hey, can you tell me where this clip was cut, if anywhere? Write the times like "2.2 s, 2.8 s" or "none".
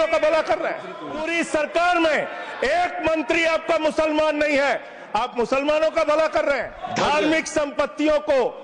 1.3 s, 6.8 s

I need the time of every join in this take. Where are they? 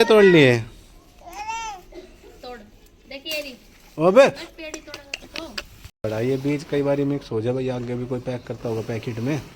6.0 s

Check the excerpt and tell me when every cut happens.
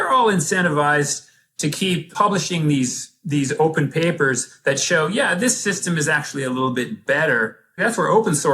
2.1 s, 7.8 s

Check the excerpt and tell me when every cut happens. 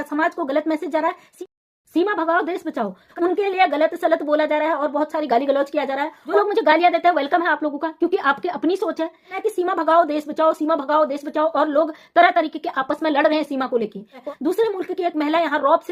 1.2 s, 3.1 s, 6.2 s, 9.3 s, 14.2 s

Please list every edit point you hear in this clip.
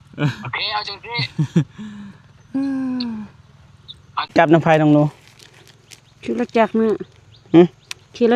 4.3 s

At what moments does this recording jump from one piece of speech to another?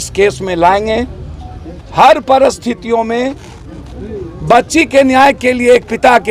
none

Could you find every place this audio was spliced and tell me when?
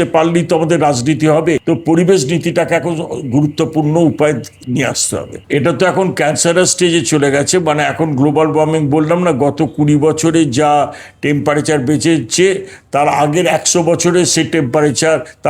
1.6 s, 5.4 s

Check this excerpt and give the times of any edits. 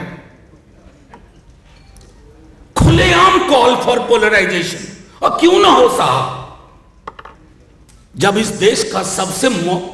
none

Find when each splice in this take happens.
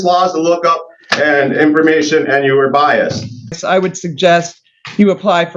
3.6 s

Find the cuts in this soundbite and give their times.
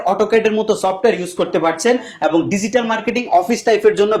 none

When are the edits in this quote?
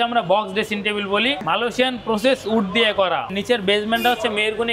1.4 s, 3.3 s

